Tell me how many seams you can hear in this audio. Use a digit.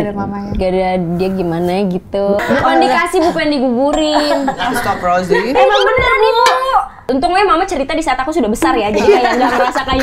2